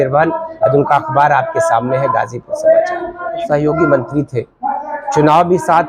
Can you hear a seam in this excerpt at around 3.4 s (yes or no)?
yes